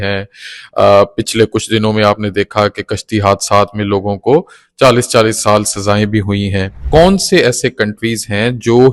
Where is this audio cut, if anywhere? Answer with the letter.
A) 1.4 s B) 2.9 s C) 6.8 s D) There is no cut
C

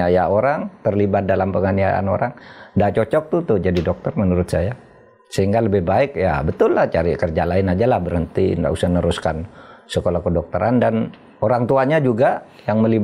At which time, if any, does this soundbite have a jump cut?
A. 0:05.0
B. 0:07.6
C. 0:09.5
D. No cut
D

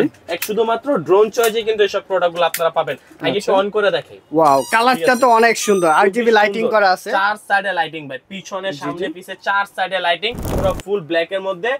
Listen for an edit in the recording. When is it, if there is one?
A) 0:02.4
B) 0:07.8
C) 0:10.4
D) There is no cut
C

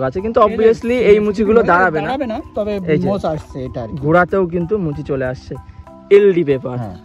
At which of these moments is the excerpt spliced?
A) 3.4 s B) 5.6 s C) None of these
B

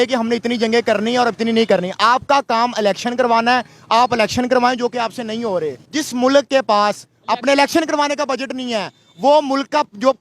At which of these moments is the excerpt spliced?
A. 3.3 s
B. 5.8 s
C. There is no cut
B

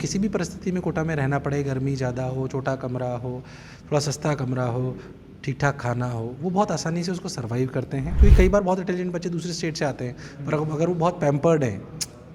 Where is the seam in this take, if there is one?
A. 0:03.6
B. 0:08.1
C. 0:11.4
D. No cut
B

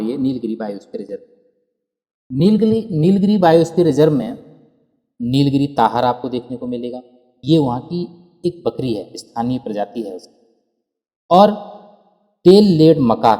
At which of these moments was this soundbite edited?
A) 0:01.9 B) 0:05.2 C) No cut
C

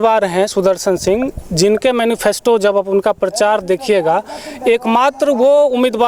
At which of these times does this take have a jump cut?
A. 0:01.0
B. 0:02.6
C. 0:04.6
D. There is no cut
D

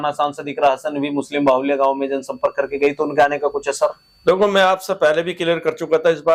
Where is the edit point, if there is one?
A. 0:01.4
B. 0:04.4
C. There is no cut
C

